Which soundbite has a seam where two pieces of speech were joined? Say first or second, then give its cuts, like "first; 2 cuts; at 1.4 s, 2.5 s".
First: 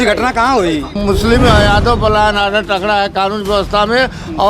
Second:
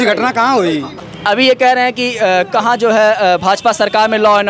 first; 1 cut; at 0.9 s